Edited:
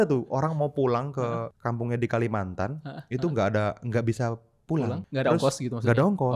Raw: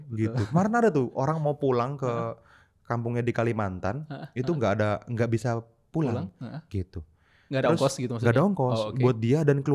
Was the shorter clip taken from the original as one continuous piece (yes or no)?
no